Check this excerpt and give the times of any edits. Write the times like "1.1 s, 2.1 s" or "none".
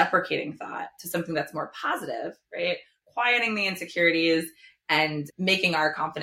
5.2 s